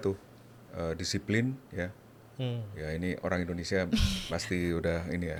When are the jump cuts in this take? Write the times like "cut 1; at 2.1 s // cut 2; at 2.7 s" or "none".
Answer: none